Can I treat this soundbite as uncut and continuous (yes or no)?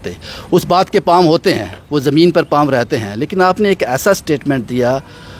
yes